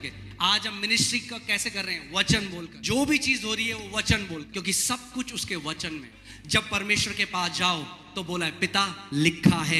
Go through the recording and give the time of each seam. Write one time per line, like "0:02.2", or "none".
0:02.7
0:04.5
0:06.2